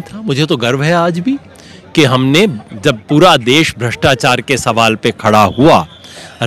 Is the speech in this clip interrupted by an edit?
no; 0 cuts

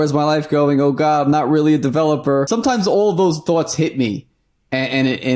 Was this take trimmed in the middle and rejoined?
yes; 1 cut; at 2.5 s

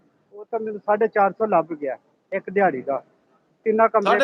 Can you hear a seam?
no; 0 cuts

